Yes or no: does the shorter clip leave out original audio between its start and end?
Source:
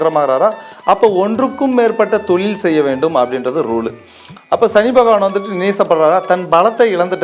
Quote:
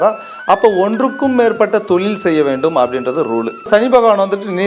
yes